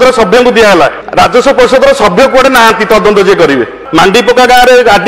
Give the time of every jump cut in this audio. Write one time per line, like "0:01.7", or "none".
0:01.0
0:03.8